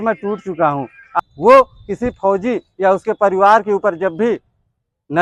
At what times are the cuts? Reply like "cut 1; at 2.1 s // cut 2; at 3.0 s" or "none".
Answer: cut 1; at 1.0 s